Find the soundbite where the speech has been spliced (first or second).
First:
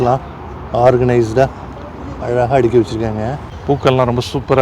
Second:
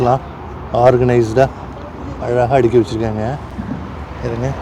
first